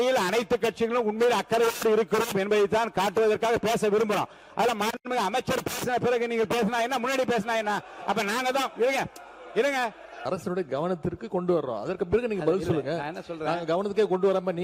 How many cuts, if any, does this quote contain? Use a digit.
1